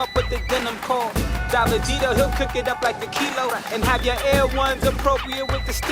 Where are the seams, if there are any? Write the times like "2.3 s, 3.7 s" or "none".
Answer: none